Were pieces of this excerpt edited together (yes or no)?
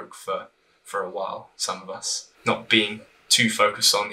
yes